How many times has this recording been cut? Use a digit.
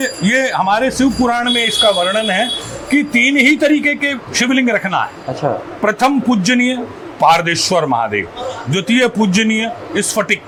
0